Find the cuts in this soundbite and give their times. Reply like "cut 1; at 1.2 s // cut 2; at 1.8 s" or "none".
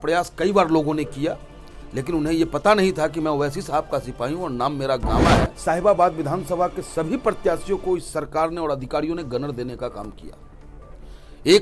cut 1; at 5.5 s

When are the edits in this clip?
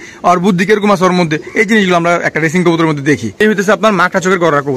cut 1; at 3.3 s

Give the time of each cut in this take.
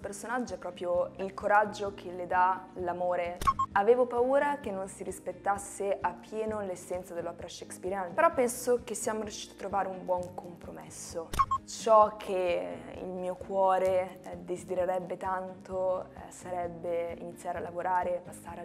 cut 1; at 1.1 s // cut 2; at 3.5 s // cut 3; at 8.1 s // cut 4; at 11.5 s

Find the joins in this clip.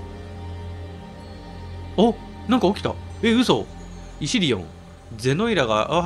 none

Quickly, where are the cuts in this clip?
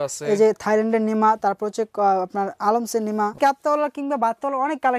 cut 1; at 3.4 s

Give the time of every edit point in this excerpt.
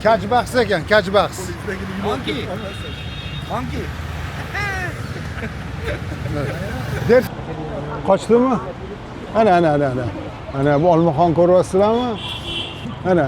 cut 1; at 7.3 s

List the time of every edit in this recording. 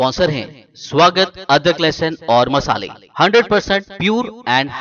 none

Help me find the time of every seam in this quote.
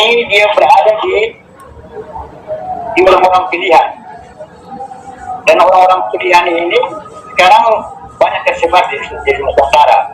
cut 1; at 1.9 s

